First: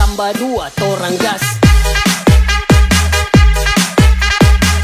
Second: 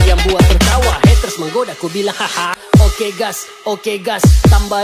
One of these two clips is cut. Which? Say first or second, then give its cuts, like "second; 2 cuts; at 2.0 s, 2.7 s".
second; 1 cut; at 2.6 s